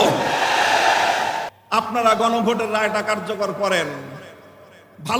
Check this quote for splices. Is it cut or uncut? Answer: cut